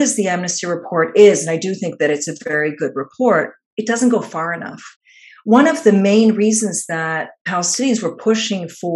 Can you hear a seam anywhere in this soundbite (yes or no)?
no